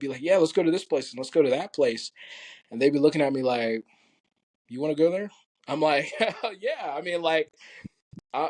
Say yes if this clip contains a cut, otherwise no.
no